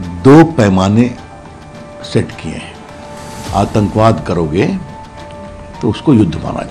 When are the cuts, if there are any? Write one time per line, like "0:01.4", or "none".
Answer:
none